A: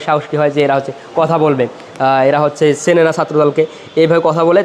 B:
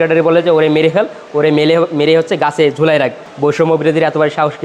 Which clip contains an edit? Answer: B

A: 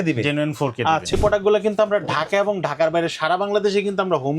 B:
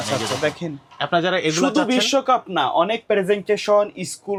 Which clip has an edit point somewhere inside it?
A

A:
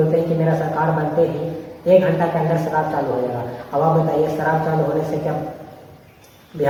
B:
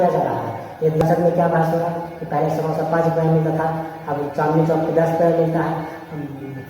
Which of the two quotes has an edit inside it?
B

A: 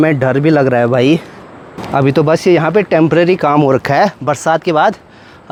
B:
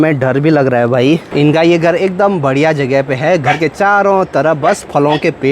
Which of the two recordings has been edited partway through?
B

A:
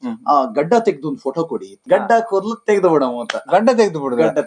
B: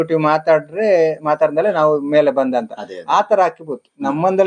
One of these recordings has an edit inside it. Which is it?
A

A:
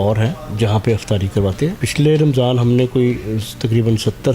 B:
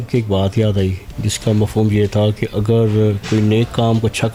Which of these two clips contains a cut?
A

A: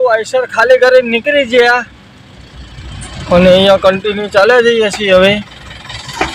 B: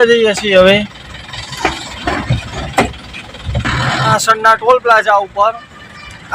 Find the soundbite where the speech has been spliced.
B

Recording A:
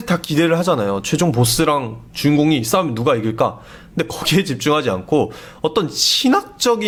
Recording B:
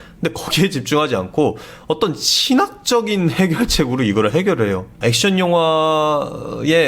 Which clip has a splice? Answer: B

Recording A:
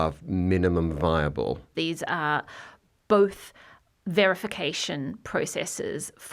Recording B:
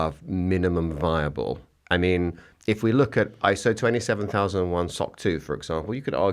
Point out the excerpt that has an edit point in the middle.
A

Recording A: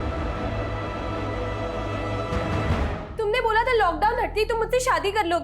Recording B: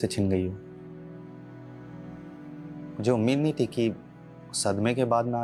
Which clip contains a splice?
A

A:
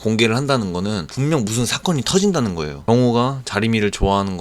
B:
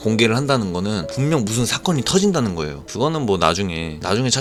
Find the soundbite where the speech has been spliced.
A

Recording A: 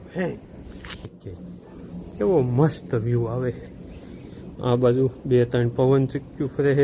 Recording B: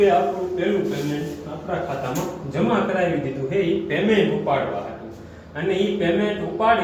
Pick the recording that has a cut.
A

